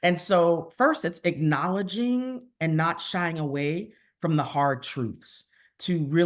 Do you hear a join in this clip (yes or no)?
no